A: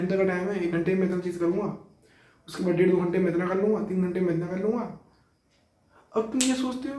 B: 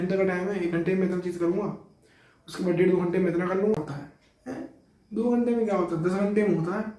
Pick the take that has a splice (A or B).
B